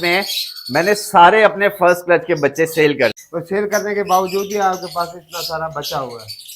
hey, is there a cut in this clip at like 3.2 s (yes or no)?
yes